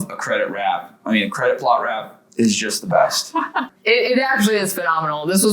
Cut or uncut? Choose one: cut